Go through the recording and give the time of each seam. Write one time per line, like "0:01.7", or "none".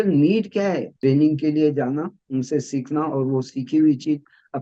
0:00.9

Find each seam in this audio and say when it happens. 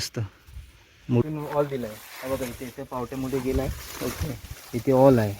0:01.2

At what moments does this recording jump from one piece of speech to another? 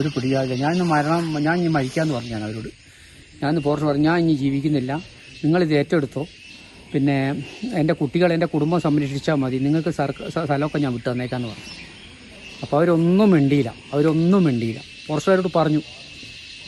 none

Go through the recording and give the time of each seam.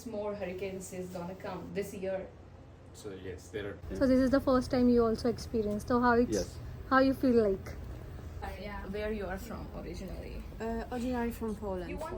0:03.8
0:08.5

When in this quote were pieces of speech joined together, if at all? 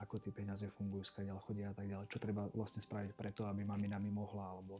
none

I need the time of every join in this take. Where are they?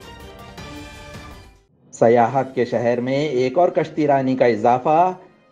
0:01.4

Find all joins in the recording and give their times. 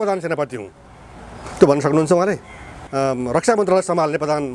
0:02.8

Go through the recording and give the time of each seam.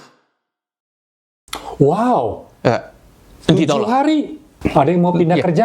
0:04.4

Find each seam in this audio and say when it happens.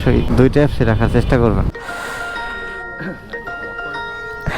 0:01.7

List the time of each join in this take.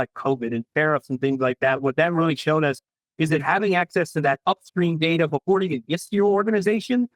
none

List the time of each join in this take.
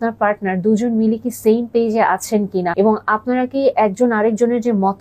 0:02.7

